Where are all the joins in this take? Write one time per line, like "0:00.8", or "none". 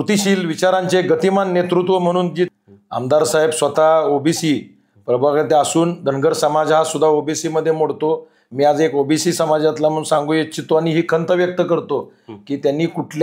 0:02.5